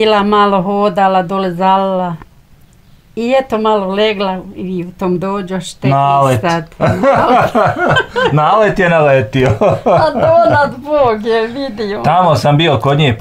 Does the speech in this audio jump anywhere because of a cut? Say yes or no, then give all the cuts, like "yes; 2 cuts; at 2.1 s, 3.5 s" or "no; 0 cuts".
no; 0 cuts